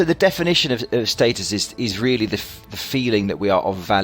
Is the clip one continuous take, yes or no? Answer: no